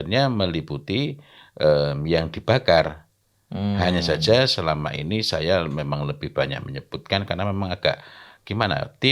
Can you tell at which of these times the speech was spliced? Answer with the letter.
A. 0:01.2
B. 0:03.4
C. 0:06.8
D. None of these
D